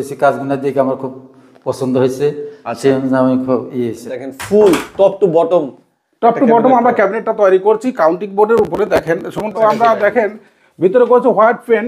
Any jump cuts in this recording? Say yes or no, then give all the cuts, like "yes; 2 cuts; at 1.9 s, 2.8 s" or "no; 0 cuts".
yes; 2 cuts; at 4.2 s, 9.4 s